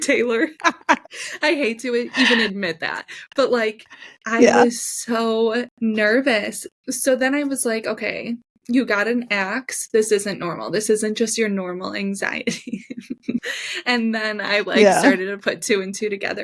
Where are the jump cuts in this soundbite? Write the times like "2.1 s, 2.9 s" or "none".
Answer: 13.4 s